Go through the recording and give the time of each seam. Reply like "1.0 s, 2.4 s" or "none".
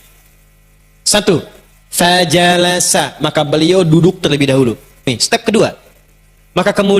5.1 s